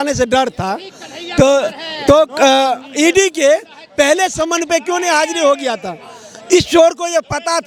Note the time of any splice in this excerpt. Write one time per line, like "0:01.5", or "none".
none